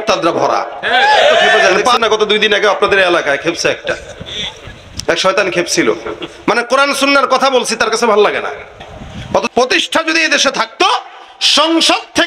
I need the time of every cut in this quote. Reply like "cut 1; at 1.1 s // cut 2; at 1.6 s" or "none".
cut 1; at 2.0 s // cut 2; at 9.5 s